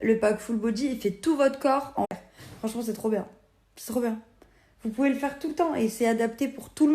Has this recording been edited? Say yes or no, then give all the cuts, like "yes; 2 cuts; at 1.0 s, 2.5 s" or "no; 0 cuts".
yes; 1 cut; at 2.1 s